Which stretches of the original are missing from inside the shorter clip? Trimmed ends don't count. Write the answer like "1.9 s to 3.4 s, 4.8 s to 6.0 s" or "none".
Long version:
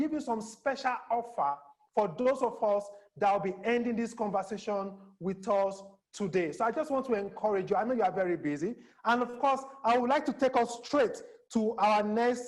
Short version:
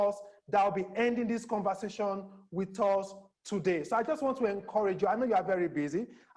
none